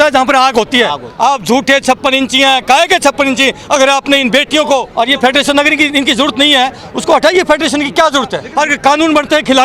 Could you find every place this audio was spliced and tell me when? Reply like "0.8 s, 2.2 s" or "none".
1.1 s, 4.9 s, 8.4 s